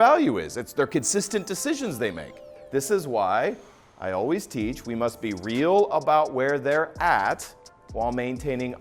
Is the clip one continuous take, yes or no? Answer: no